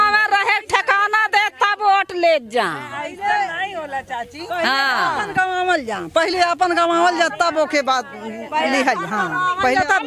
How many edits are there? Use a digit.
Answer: 0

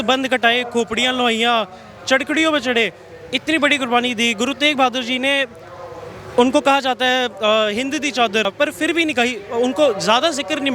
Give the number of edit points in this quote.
1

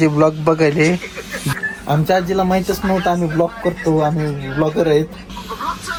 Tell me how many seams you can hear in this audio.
0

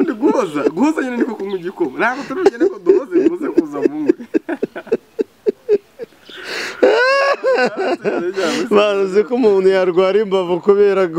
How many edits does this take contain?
0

